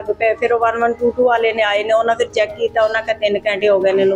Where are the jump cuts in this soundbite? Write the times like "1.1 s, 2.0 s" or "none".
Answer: none